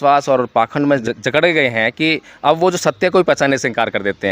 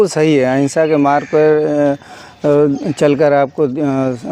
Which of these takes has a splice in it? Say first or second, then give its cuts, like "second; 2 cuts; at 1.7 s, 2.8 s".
first; 1 cut; at 1.0 s